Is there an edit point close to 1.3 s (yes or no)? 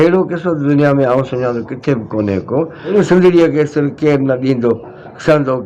no